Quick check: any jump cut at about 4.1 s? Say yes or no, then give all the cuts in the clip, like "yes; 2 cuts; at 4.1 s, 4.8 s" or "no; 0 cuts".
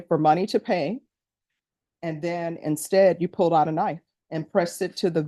yes; 1 cut; at 4.1 s